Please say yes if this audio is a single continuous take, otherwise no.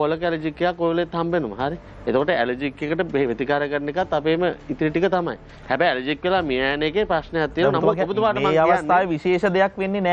yes